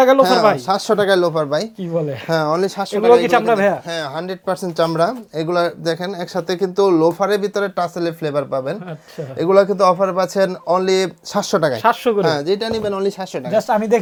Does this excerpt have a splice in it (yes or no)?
no